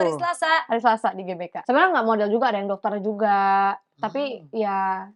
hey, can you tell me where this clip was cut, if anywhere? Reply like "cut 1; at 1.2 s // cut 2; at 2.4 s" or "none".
cut 1; at 1.5 s